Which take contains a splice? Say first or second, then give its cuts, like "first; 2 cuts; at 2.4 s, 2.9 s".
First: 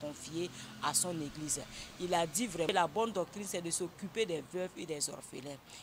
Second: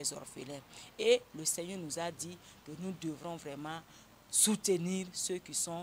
first; 1 cut; at 2.8 s